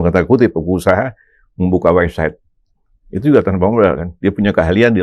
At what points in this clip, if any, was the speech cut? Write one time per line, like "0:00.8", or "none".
none